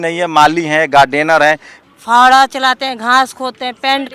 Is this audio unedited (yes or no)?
no